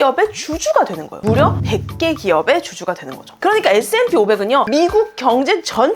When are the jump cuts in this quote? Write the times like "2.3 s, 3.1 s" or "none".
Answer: 3.3 s